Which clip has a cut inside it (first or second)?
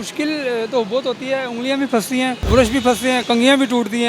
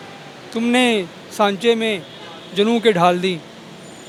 first